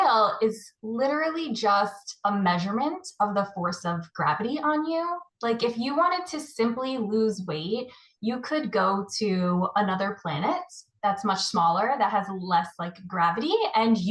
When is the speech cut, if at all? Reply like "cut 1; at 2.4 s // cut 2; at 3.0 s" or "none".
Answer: none